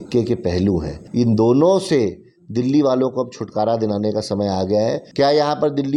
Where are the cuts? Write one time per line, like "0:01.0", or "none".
0:01.0
0:05.0